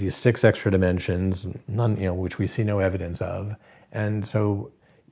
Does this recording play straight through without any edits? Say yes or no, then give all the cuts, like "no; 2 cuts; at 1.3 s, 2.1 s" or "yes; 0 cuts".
no; 1 cut; at 1.6 s